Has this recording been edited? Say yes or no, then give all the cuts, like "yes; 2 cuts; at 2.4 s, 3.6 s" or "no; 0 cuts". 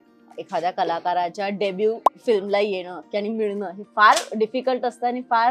no; 0 cuts